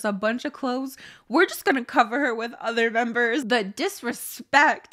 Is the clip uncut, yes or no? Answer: no